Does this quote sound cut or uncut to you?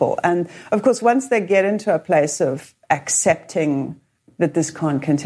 cut